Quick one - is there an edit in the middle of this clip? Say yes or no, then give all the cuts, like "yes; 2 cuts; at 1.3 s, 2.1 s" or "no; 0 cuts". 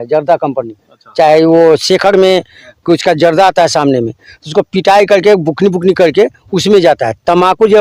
no; 0 cuts